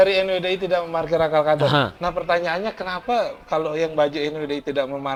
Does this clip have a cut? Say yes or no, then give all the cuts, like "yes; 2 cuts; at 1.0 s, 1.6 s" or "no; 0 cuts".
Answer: no; 0 cuts